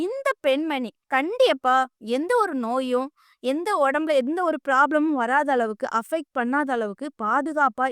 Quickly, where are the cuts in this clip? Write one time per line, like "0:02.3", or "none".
0:01.0